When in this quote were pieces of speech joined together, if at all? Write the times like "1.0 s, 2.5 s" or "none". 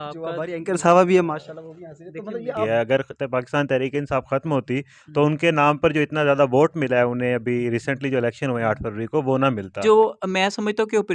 2.6 s, 9.8 s